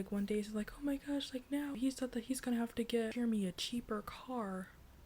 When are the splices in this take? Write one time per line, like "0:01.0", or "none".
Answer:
0:01.8
0:03.1